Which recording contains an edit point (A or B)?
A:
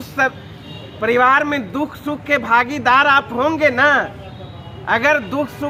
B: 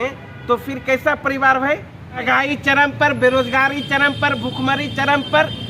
B